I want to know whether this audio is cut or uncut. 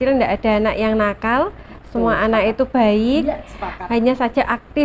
uncut